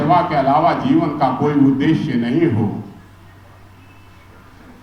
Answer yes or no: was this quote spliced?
no